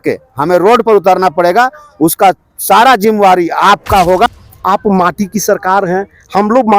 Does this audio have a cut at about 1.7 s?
no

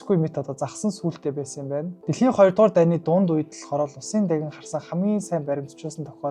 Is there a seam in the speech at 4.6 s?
no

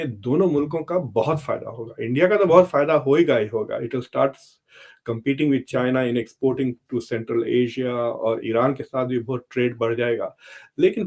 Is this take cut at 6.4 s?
no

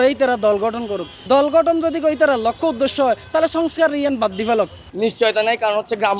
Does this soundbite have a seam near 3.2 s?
no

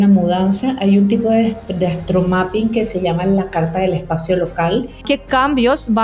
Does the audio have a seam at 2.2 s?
no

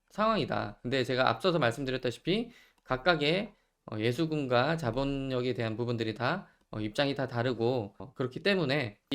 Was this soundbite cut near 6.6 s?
no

